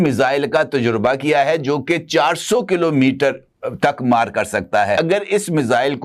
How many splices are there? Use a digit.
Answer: 1